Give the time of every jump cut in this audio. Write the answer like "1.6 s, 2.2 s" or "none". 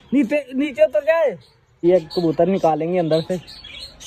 1.8 s